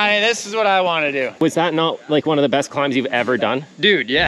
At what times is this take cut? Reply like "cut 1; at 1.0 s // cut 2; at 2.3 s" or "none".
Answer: cut 1; at 1.4 s